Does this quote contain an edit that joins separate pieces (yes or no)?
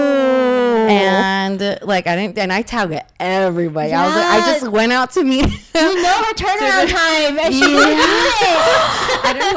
no